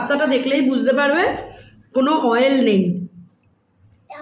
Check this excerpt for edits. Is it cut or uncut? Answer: uncut